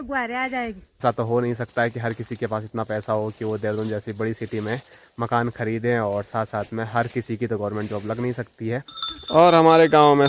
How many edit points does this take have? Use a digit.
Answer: 2